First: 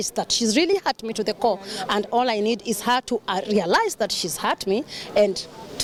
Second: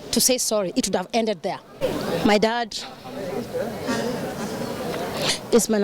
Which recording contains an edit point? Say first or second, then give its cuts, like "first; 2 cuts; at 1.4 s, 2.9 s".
second; 1 cut; at 1.8 s